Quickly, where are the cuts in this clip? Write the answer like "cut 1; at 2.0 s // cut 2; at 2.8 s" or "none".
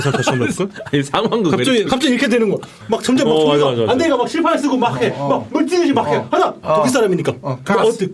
cut 1; at 2.7 s // cut 2; at 6.6 s